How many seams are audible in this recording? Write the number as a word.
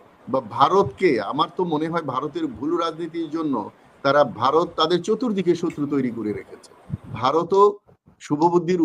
one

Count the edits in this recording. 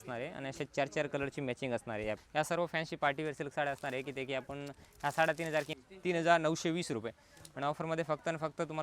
two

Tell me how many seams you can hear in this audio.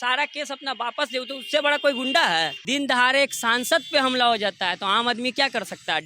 one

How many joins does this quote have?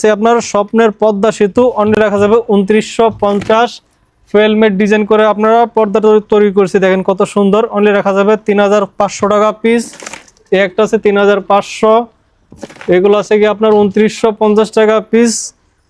zero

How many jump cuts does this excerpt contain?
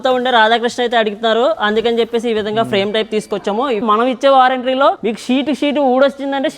two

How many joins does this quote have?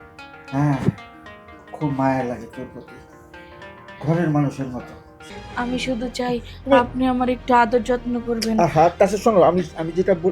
one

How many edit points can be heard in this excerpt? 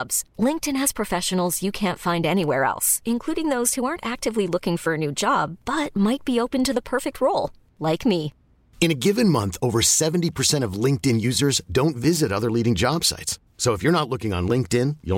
zero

